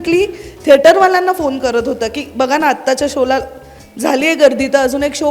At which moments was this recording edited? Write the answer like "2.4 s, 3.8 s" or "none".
none